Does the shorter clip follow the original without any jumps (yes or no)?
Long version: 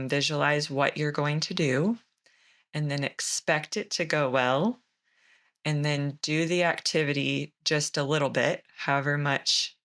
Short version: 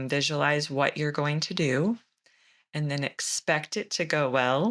yes